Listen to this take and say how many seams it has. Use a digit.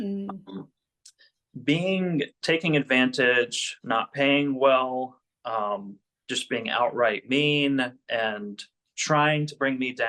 0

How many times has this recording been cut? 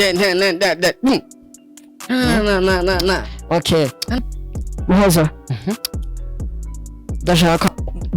1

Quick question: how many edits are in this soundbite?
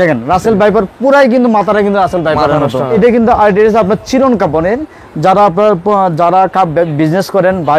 1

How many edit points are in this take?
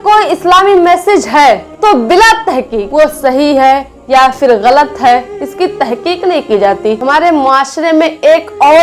3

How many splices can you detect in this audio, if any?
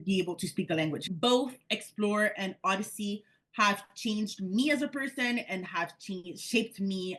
1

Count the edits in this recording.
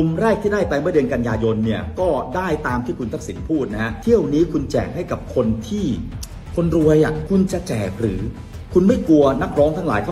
2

